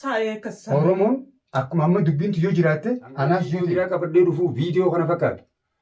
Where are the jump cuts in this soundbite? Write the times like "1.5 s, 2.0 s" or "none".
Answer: 3.7 s